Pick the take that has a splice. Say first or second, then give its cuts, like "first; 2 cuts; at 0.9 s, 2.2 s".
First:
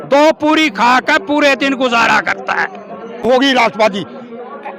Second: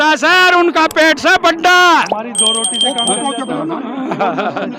first; 1 cut; at 3.2 s